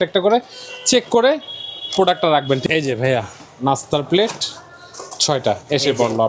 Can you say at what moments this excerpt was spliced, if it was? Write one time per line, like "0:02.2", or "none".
0:02.6

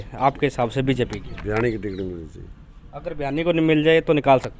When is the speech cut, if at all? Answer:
none

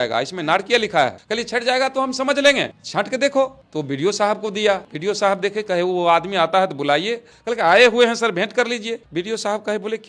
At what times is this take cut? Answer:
0:04.9
0:09.0

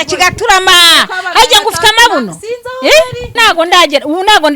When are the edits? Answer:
0:03.4

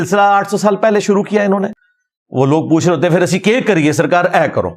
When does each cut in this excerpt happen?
0:01.7

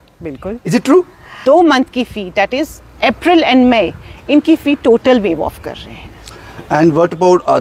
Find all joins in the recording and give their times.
0:01.3

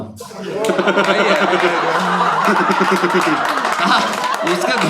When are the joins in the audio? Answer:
none

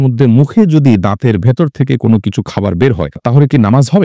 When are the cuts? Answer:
none

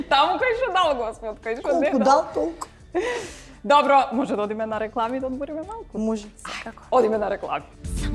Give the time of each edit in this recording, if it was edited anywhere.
none

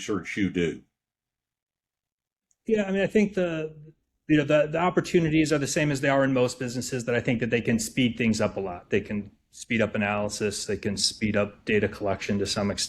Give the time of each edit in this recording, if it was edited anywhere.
none

